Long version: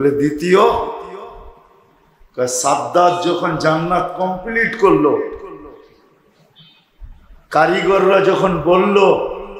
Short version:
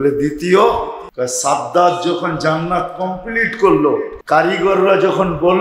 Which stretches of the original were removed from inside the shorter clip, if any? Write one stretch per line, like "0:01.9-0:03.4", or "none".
0:01.0-0:02.2
0:05.3-0:07.4